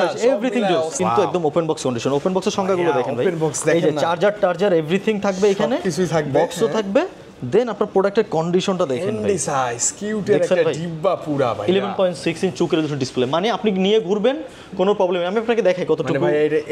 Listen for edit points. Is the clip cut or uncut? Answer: cut